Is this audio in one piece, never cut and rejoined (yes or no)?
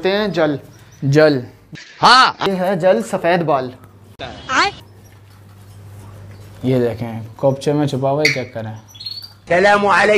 yes